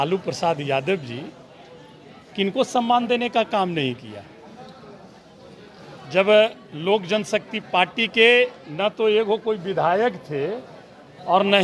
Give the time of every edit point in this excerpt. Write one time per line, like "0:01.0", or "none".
0:05.8